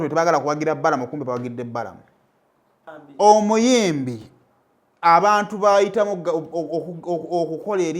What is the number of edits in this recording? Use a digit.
1